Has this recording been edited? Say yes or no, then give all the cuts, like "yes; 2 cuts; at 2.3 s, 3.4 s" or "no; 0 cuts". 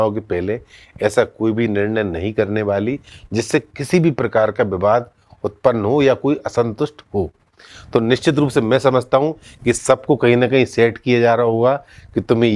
no; 0 cuts